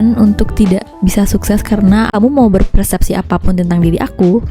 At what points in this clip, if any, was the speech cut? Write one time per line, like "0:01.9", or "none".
0:02.1